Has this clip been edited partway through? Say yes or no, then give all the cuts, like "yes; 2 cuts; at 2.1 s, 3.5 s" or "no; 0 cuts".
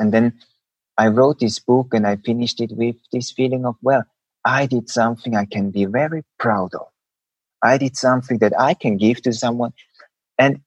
no; 0 cuts